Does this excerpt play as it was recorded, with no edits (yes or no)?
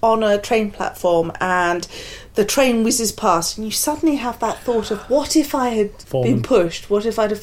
no